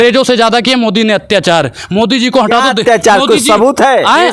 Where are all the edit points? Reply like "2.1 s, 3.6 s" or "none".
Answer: none